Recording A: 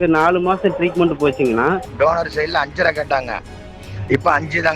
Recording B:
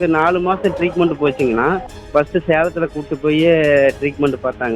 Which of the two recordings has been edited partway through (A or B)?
A